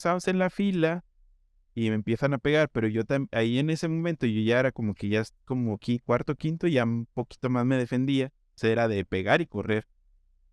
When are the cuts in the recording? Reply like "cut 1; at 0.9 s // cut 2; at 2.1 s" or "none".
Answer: none